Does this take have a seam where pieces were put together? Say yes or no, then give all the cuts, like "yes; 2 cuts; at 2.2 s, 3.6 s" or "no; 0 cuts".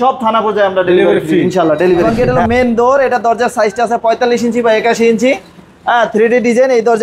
yes; 1 cut; at 2.1 s